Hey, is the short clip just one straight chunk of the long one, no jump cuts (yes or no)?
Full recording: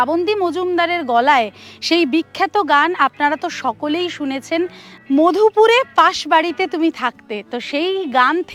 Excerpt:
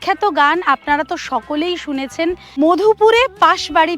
no